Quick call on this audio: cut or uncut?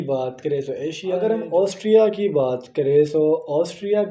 cut